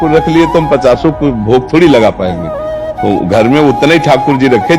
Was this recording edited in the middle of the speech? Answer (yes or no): no